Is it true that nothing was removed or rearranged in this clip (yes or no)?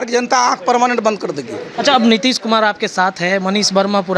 yes